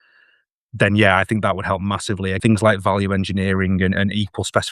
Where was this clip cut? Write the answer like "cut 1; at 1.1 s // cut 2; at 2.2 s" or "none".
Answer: cut 1; at 2.4 s